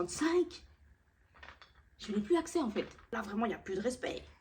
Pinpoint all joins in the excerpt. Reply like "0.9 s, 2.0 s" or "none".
3.2 s